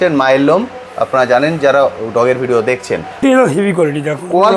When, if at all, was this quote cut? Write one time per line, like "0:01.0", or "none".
0:03.2